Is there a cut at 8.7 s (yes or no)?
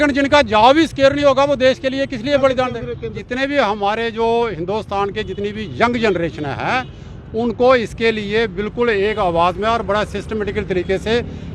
no